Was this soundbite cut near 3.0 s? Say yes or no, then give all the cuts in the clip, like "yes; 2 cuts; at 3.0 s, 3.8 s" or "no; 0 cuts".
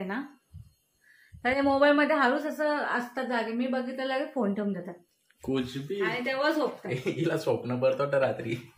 no; 1 cut; at 5.3 s